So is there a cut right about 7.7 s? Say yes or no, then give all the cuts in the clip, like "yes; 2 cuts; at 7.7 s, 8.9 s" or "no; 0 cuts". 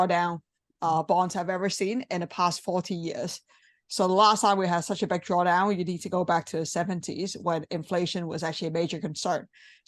no; 0 cuts